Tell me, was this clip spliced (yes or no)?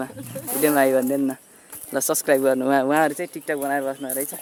no